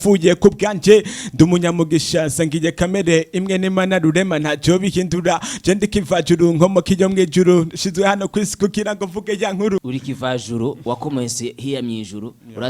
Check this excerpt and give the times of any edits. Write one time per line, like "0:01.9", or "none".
0:09.8